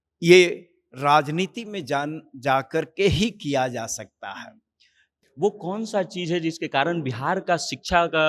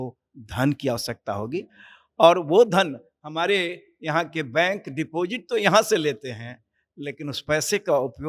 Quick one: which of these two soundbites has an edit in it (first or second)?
first